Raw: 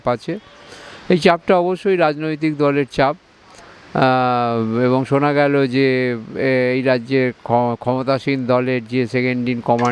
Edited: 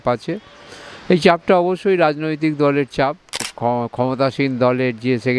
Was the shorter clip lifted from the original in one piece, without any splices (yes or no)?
no